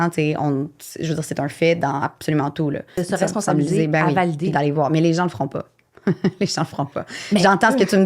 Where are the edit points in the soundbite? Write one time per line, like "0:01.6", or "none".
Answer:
0:03.0